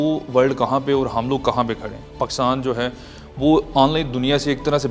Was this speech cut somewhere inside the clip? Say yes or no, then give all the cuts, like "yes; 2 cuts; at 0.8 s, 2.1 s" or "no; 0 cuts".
no; 0 cuts